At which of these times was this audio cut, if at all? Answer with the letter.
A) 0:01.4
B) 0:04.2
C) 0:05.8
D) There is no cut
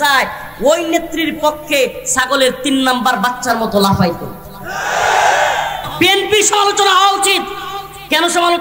C